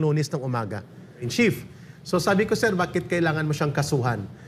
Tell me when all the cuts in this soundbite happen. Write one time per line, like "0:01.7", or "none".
0:01.2